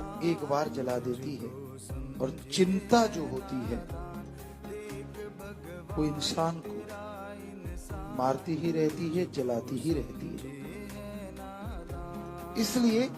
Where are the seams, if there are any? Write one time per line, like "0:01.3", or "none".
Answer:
0:03.9
0:05.9
0:06.6
0:08.1